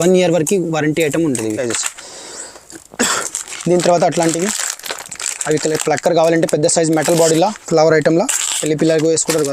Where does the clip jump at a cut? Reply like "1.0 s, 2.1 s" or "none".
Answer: 1.6 s